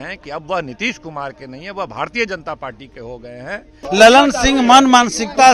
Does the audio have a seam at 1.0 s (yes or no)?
no